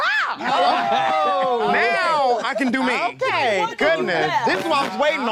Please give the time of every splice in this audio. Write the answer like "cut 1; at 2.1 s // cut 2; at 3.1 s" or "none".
none